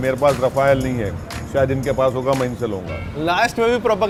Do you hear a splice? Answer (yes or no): no